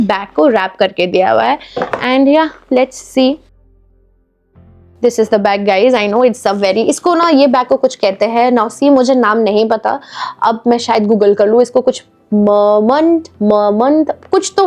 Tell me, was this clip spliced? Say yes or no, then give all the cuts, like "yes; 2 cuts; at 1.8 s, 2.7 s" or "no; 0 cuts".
no; 0 cuts